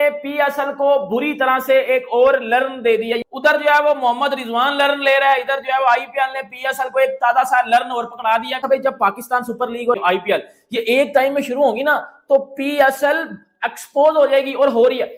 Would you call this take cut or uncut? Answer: uncut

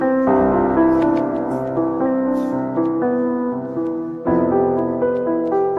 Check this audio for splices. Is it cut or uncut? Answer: uncut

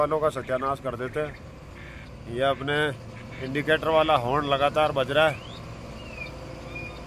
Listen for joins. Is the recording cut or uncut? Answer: uncut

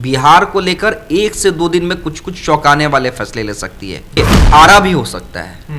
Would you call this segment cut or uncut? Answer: cut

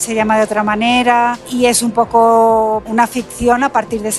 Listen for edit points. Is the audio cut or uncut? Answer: cut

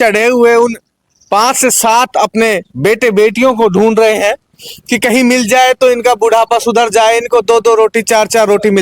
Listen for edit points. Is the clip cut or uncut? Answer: uncut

